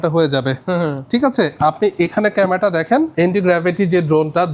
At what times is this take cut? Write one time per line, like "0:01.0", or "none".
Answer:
0:03.1